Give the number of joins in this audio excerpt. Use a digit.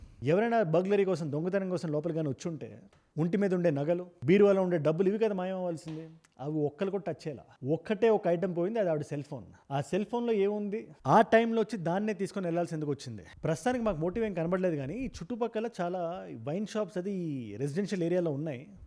1